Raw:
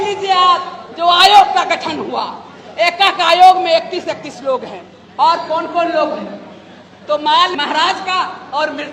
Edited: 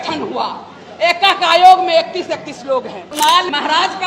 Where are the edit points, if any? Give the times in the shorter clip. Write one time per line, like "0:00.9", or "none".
0:03.2